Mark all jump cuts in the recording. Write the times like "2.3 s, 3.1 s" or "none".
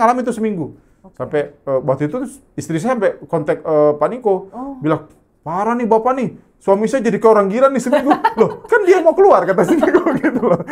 none

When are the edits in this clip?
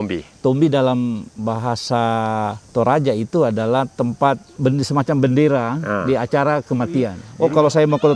2.6 s, 4.5 s, 7.2 s

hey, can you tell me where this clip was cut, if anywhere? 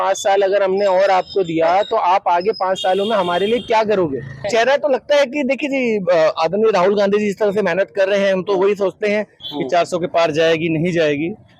4.4 s, 9.4 s

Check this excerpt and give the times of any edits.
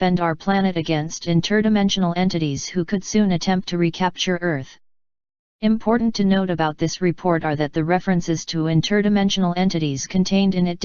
2.7 s

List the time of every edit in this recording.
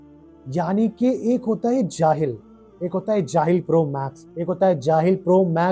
none

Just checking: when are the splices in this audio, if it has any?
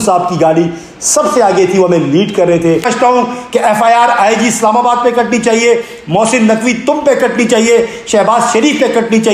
2.9 s

